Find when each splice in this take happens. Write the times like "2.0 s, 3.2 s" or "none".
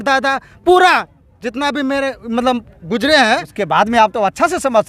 3.6 s

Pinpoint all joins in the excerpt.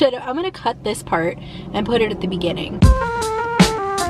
2.7 s

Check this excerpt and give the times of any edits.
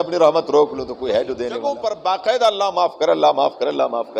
1.5 s

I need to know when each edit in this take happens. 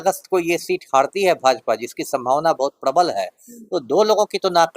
none

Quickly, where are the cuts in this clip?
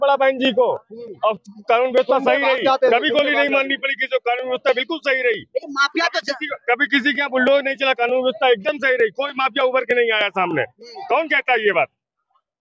none

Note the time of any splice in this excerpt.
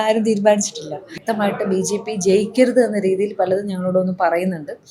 1.2 s

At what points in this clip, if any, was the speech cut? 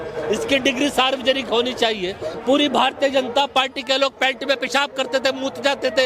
2.3 s

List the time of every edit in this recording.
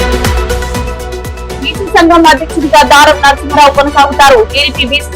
1.1 s

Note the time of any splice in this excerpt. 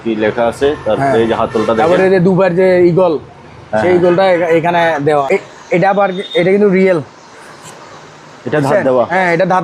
5.2 s

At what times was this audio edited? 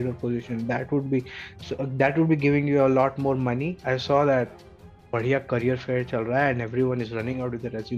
3.8 s

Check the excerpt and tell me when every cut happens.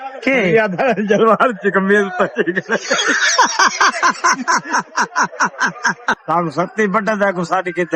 6.2 s

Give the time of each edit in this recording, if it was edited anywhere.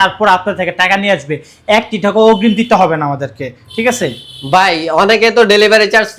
none

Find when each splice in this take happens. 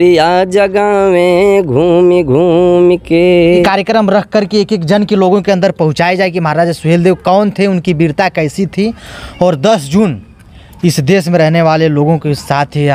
3.5 s

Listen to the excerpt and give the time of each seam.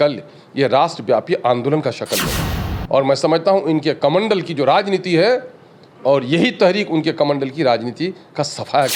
none

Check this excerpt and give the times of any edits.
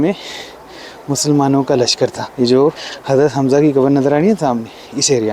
2.2 s, 2.9 s

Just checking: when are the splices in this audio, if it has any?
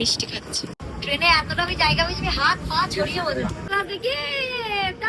0.8 s, 3.7 s

